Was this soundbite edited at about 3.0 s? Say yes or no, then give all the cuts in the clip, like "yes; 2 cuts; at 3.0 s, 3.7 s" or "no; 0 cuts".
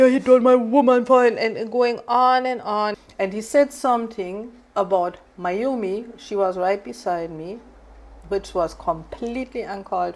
yes; 1 cut; at 3.0 s